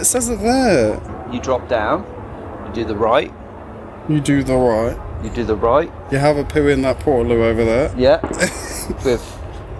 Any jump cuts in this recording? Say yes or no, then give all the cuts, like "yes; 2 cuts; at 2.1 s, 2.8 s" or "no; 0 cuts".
yes; 1 cut; at 1.1 s